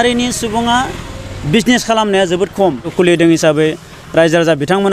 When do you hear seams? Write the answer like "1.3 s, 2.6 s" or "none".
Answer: 2.9 s